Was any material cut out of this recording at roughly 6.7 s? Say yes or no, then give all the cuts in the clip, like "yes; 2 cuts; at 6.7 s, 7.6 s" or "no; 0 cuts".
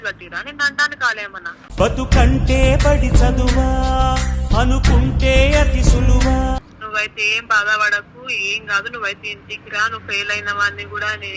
yes; 1 cut; at 6.7 s